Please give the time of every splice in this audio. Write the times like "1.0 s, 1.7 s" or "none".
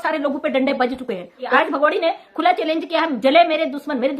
1.5 s